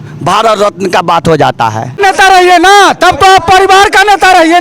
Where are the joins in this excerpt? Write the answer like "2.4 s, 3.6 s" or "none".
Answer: 2.0 s